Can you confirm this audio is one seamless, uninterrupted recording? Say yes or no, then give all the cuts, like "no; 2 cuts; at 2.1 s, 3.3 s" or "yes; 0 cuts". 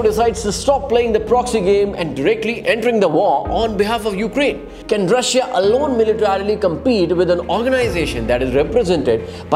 no; 1 cut; at 4.7 s